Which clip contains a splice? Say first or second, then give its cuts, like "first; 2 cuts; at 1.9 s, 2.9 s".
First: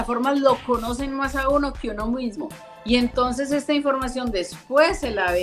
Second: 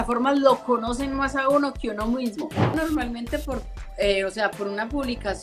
second; 1 cut; at 2.7 s